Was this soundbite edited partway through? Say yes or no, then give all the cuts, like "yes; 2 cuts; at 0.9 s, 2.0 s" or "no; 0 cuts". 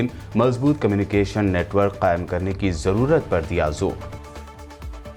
no; 0 cuts